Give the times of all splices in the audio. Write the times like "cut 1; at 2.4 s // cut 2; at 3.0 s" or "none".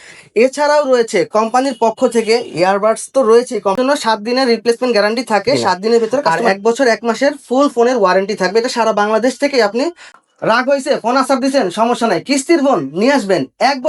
cut 1; at 3.8 s // cut 2; at 6.3 s // cut 3; at 10.0 s

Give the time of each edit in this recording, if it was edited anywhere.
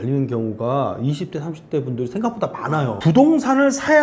cut 1; at 3.0 s

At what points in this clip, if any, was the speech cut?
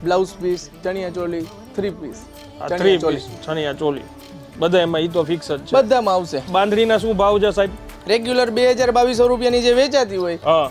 cut 1; at 6.5 s

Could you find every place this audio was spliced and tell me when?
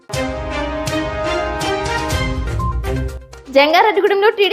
cut 1; at 2.8 s

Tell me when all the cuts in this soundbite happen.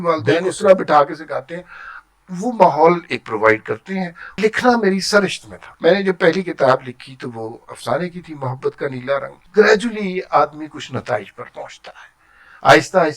cut 1; at 4.4 s // cut 2; at 5.6 s // cut 3; at 9.4 s

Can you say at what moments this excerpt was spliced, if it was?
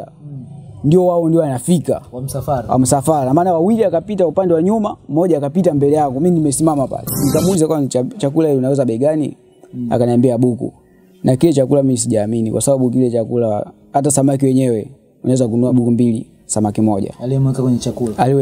cut 1; at 7.3 s // cut 2; at 15.7 s

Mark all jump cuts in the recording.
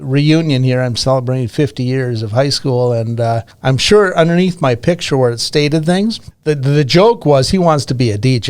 cut 1; at 3.5 s // cut 2; at 6.3 s

